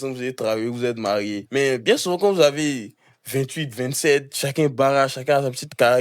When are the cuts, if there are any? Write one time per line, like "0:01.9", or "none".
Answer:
0:01.4